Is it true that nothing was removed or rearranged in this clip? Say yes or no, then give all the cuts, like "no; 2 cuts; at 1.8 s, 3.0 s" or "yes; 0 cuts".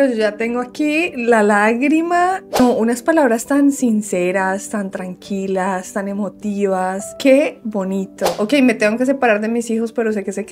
no; 2 cuts; at 2.6 s, 8.3 s